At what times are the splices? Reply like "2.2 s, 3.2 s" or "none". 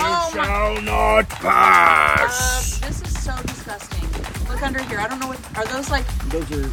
none